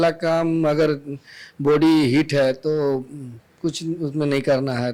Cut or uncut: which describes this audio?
uncut